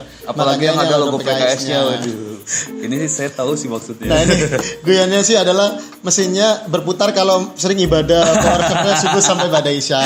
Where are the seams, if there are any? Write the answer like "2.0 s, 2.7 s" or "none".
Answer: none